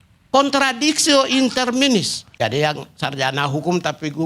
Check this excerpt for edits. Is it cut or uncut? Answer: cut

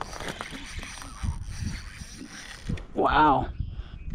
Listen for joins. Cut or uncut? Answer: uncut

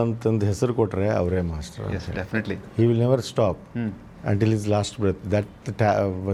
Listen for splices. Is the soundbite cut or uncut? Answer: uncut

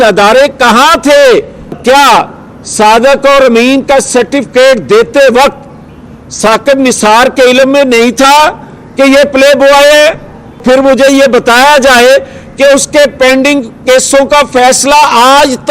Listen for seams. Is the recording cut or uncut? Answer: cut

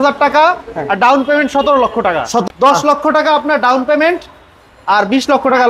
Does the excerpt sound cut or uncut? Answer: cut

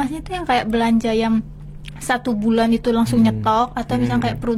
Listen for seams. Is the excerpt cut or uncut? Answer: uncut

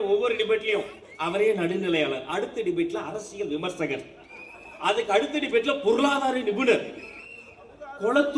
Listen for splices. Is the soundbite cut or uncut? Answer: uncut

